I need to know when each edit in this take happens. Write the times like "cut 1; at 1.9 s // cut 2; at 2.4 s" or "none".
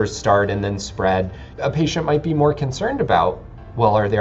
cut 1; at 1.4 s